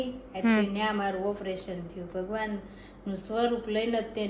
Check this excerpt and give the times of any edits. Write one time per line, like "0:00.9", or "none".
0:02.1